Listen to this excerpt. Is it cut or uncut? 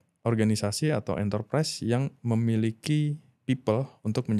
uncut